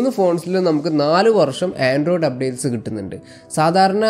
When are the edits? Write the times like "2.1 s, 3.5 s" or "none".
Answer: none